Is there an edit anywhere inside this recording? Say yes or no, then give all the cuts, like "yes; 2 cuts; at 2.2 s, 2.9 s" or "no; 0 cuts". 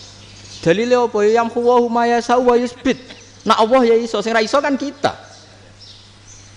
no; 0 cuts